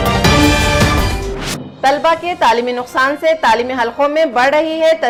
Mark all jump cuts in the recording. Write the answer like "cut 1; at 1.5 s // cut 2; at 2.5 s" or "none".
none

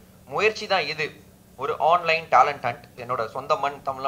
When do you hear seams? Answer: cut 1; at 3.0 s

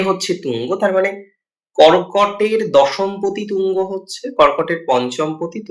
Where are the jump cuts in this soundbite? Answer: none

